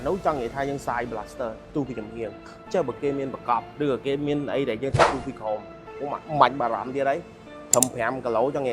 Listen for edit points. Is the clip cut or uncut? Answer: uncut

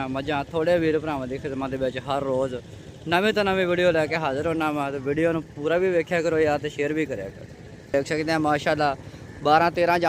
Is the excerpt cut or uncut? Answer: cut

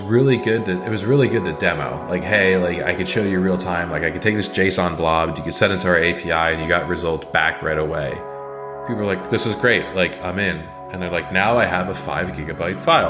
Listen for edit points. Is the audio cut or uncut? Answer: cut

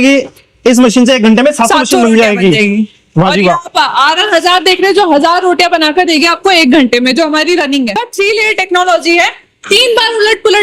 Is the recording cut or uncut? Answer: cut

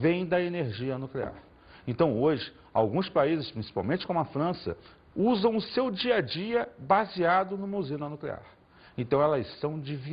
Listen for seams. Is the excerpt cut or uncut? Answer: uncut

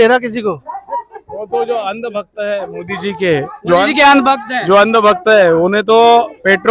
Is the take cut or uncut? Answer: uncut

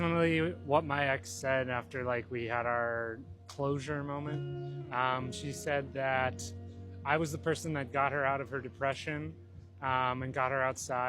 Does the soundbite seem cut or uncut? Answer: cut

